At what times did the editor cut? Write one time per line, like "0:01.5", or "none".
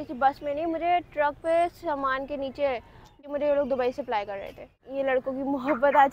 0:03.3
0:04.8